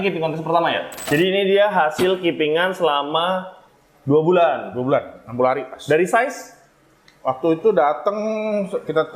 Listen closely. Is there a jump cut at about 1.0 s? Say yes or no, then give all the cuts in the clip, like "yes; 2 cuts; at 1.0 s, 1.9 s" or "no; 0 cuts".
yes; 1 cut; at 1.0 s